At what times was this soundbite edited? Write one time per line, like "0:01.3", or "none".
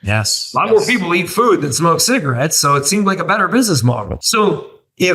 0:04.2